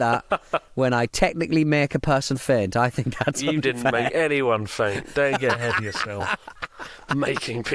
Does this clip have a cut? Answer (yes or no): no